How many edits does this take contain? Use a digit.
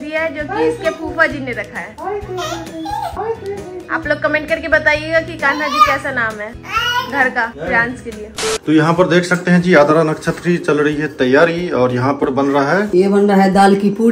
0